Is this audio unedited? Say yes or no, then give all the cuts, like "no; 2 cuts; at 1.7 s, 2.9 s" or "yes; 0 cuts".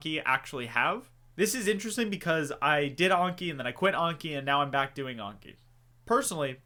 yes; 0 cuts